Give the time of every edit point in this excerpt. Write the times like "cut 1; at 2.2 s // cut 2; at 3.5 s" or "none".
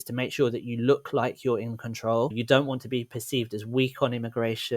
cut 1; at 2.4 s